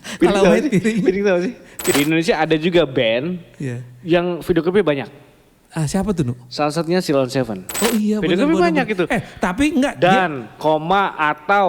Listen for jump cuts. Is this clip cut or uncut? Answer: cut